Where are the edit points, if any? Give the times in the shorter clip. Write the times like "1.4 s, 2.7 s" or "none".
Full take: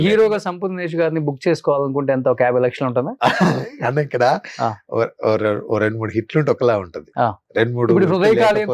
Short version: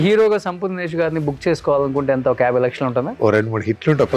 3.1 s

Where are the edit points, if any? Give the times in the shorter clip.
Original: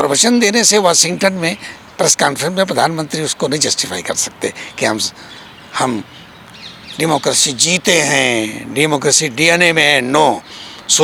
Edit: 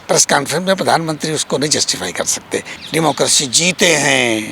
2.7 s

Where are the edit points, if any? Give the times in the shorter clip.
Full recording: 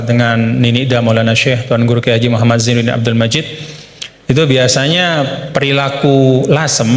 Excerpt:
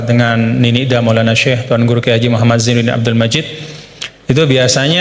none

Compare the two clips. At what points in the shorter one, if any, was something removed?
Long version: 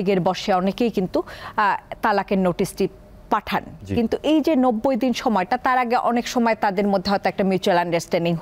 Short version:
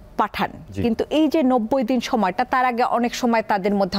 none

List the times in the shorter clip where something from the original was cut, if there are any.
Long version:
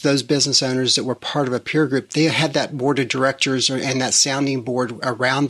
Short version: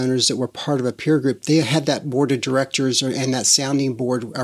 none

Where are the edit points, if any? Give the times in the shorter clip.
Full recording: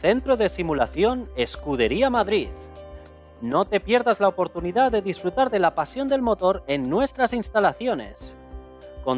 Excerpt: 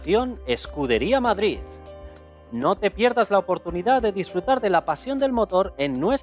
none

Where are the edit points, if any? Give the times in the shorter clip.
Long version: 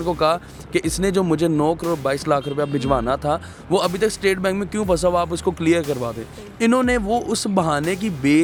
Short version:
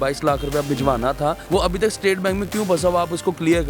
1.4 s

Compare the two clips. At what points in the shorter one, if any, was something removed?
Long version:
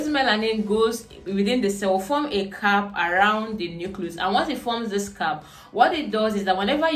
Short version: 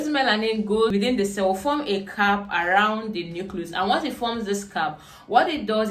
0.9 s

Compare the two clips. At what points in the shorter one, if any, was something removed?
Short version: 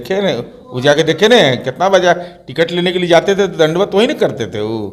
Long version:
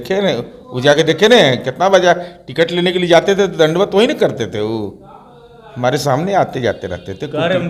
none

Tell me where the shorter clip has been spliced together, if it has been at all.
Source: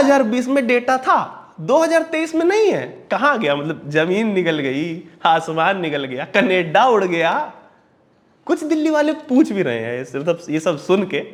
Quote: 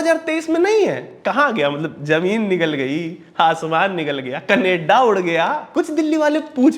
5.6 s

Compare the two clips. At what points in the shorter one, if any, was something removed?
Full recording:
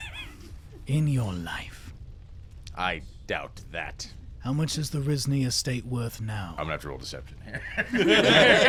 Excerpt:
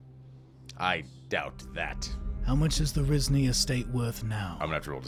none

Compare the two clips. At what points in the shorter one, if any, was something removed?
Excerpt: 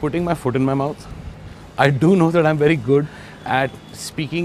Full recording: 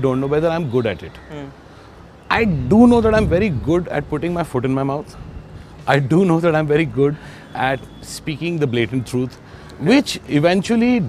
none

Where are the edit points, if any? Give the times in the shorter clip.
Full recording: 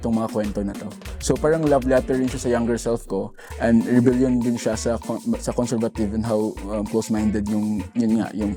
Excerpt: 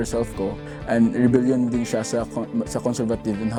none

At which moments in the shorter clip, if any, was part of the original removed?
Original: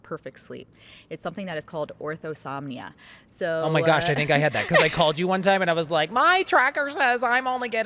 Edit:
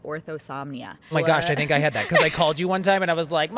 1.1 s

